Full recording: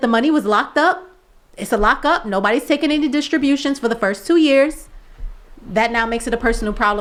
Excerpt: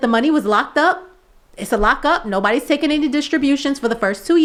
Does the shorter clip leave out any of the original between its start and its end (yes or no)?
no